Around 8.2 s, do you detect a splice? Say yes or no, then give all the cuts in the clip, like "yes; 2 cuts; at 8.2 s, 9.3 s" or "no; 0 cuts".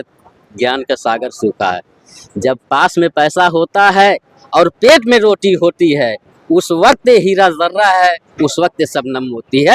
no; 0 cuts